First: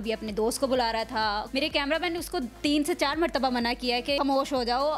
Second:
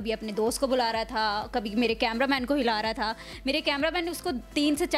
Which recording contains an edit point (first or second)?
first